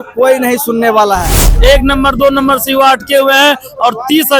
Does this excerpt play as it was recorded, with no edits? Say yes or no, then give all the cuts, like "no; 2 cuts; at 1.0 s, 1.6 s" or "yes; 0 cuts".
no; 1 cut; at 1.5 s